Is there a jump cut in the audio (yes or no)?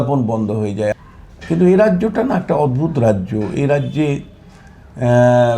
yes